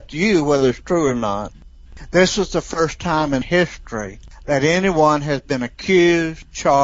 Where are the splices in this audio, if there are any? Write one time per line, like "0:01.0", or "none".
0:01.7